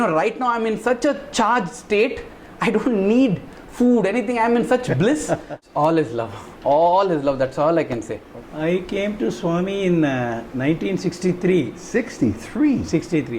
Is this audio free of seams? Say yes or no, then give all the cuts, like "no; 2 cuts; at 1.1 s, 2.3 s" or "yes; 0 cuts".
no; 2 cuts; at 5.5 s, 8.2 s